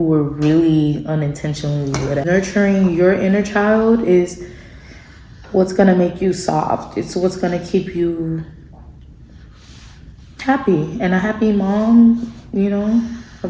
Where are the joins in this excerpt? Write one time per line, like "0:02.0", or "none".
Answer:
0:02.2